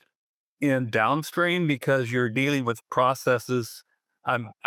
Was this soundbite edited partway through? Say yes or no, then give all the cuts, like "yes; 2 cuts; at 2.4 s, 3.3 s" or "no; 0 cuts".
no; 0 cuts